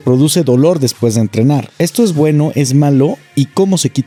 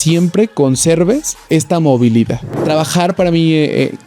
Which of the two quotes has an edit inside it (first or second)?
second